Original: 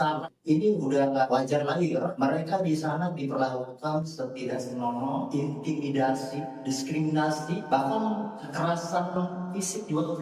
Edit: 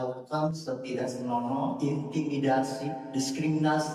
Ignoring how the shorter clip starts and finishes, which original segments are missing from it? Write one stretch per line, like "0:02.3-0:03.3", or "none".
none

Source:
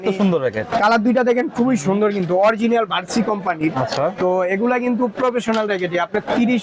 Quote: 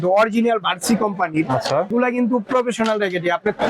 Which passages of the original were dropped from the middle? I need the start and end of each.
0:04.2-0:04.6

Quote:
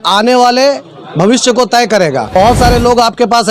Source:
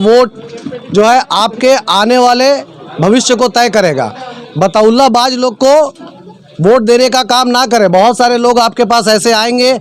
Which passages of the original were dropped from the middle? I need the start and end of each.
0:04.2-0:07.9

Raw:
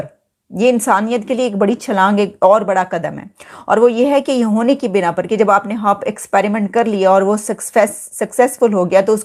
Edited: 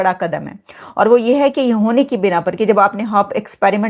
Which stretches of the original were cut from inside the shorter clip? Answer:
none

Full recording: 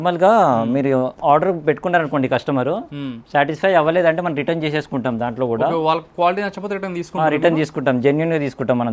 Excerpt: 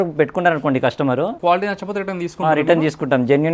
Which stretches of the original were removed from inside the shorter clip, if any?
0:02.8-0:06.1

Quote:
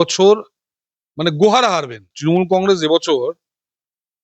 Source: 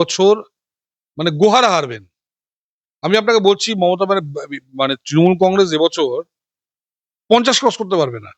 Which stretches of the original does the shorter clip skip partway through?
0:02.1-0:05.0

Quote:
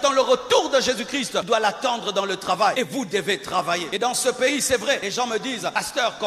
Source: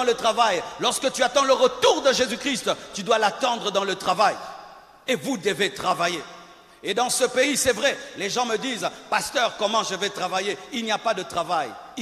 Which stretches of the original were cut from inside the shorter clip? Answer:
0:02.8-0:03.0
0:04.3-0:05.1
0:06.2-0:06.8
0:08.2-0:08.7

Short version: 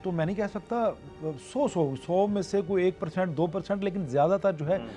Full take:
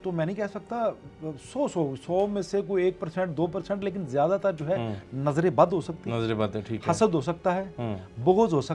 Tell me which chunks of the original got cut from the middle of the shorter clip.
none

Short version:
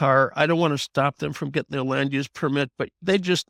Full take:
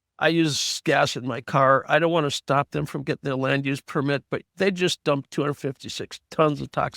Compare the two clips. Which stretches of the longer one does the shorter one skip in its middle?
none

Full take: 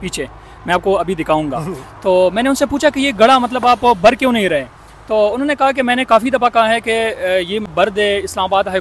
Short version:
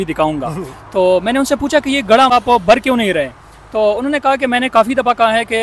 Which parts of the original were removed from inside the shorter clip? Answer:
0:03.4-0:03.6

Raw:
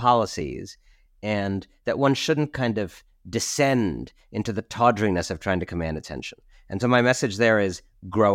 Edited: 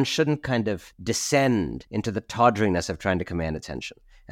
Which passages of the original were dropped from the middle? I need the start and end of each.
0:03.0-0:03.2
0:04.1-0:04.2

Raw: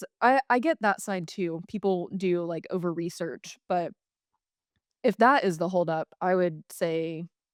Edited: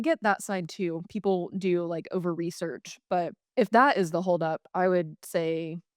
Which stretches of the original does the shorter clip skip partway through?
0:04.0-0:04.9

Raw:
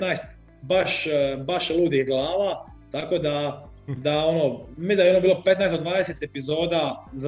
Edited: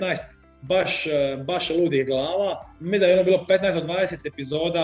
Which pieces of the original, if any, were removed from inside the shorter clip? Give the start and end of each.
0:02.7-0:04.7

